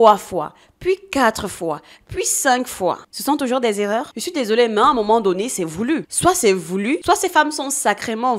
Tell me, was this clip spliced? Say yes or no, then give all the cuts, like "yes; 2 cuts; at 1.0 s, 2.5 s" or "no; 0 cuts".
no; 0 cuts